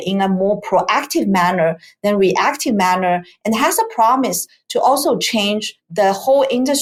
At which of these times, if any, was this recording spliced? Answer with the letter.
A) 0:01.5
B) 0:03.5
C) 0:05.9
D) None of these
D